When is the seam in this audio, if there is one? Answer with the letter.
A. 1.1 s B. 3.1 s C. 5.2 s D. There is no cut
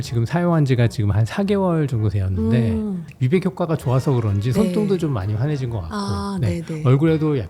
B